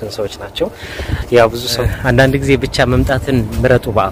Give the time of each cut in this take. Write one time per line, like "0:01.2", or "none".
0:01.8